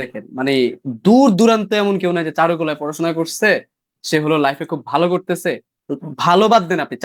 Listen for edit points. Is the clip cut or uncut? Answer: uncut